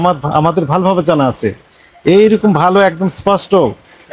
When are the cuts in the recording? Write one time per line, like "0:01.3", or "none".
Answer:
none